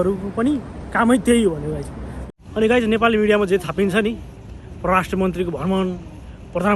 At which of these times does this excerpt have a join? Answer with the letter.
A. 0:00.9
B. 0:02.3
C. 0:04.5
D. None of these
B